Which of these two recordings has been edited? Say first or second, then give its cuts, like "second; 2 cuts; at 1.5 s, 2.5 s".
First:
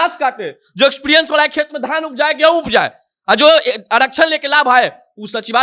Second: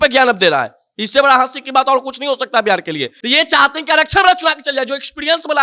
second; 1 cut; at 3.1 s